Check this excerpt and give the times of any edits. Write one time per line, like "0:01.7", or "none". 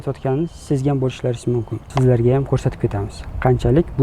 0:01.8